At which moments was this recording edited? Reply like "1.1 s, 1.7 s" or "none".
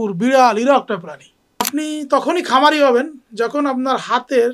1.7 s